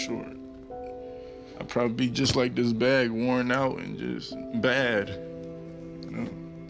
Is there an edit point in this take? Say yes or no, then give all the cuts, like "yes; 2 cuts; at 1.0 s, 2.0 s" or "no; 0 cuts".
yes; 1 cut; at 1.5 s